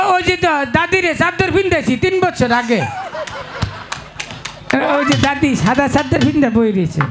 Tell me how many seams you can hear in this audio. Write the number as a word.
zero